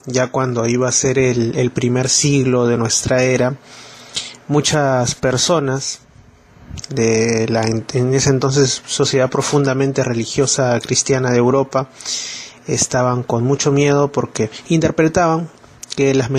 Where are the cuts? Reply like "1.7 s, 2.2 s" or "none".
14.8 s

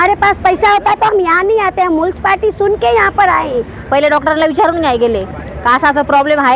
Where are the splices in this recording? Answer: 3.8 s

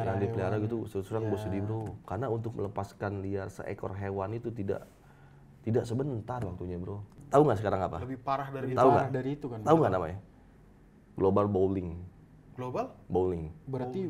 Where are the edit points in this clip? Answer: 2.0 s, 7.1 s

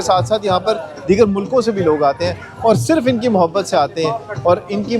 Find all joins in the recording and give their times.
none

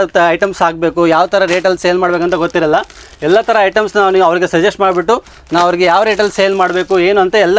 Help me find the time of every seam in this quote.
none

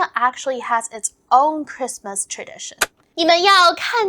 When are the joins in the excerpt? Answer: 3.0 s

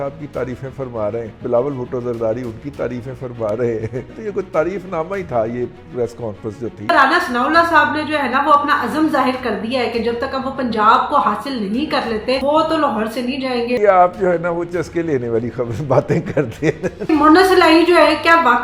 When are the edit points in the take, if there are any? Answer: 1.4 s, 4.1 s, 6.9 s, 12.4 s, 13.8 s, 17.1 s

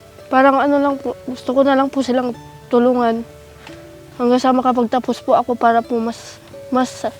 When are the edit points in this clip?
none

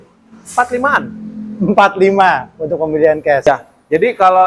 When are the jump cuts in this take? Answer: 3.4 s

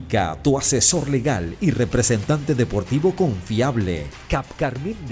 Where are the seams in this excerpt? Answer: 4.1 s

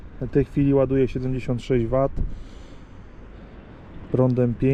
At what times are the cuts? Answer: none

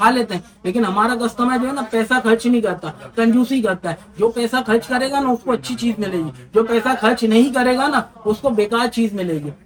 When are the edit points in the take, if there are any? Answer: none

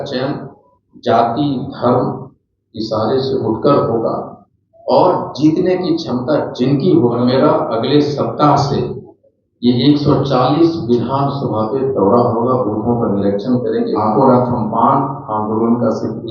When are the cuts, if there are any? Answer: 7.2 s, 14.0 s

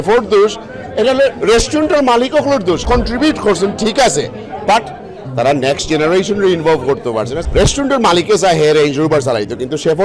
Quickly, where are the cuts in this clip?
2.8 s, 7.4 s

